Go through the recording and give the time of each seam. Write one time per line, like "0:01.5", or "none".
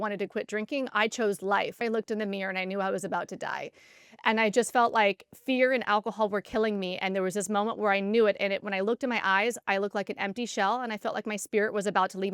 0:01.8